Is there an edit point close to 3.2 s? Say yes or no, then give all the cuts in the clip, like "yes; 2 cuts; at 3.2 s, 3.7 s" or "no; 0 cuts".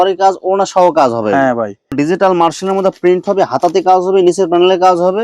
no; 1 cut; at 1.9 s